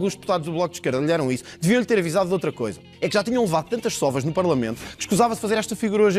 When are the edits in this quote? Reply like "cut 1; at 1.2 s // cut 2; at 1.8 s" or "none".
none